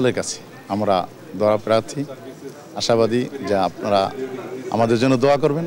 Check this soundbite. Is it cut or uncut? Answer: uncut